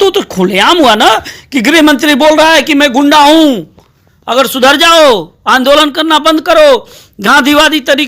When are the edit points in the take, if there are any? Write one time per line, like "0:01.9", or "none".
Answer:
none